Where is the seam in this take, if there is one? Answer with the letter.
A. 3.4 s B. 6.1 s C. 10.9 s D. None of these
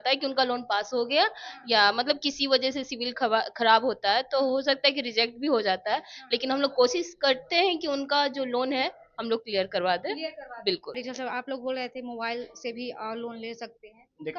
C